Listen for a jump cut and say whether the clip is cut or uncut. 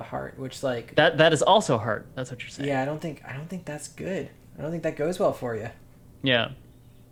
uncut